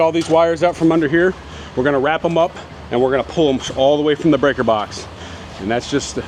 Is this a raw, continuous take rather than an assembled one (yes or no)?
yes